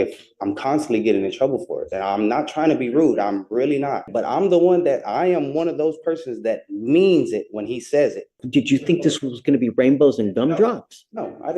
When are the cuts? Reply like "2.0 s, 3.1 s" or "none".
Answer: 4.0 s, 8.4 s